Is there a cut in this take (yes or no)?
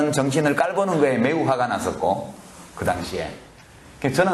no